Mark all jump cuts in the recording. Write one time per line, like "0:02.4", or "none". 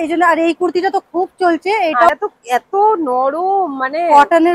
0:02.1